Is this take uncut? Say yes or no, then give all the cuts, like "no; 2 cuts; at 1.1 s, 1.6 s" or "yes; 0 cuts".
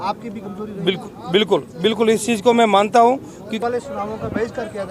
no; 1 cut; at 3.6 s